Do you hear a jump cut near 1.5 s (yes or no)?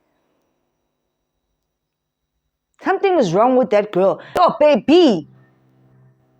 no